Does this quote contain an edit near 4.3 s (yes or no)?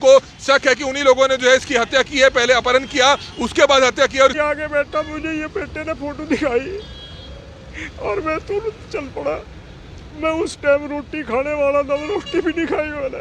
yes